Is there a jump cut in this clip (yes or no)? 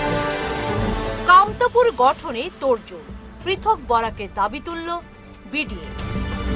no